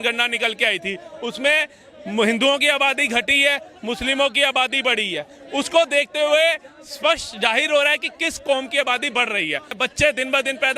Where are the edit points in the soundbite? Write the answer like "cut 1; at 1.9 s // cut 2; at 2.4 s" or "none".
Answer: cut 1; at 9.7 s